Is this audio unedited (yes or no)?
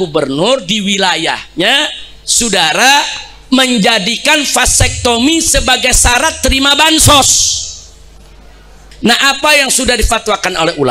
no